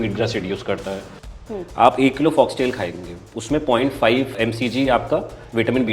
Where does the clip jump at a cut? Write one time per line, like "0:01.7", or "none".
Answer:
0:01.3